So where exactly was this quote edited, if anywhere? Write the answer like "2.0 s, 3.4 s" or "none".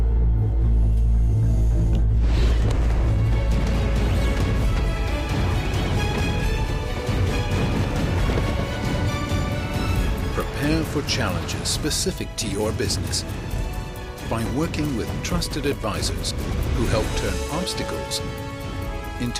none